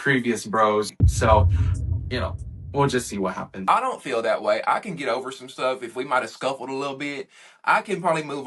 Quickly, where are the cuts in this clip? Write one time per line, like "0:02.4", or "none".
0:00.9
0:03.6